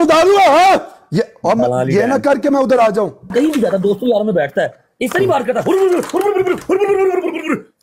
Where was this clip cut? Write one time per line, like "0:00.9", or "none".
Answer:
0:03.3